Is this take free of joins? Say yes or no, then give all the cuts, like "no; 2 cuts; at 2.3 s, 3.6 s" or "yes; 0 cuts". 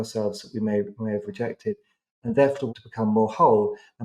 no; 1 cut; at 2.7 s